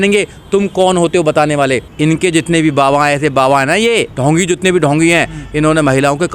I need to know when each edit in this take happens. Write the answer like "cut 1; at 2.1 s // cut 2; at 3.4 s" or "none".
cut 1; at 1.9 s